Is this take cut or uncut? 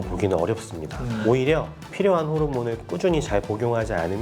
cut